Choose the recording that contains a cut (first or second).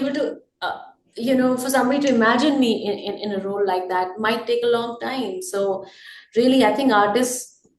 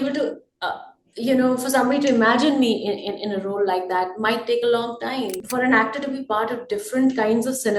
second